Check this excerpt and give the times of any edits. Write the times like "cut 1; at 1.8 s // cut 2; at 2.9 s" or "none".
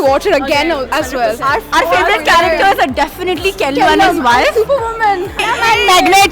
cut 1; at 1.7 s // cut 2; at 5.4 s